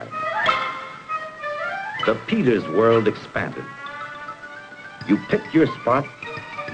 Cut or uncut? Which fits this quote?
cut